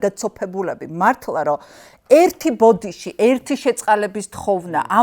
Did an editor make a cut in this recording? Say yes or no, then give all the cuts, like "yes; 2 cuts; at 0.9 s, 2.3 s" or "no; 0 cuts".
no; 0 cuts